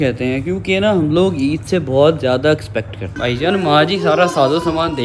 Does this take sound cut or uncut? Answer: cut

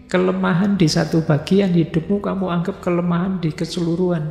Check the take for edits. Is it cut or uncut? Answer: uncut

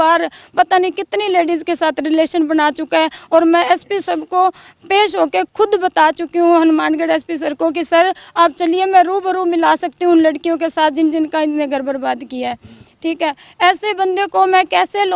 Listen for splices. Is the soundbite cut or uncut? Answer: uncut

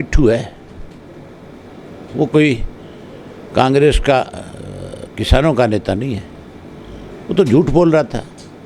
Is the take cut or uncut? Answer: uncut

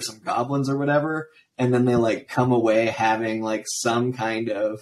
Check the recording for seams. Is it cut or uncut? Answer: uncut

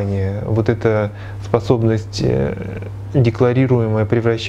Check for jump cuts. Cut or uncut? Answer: uncut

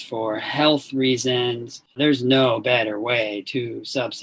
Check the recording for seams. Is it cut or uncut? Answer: cut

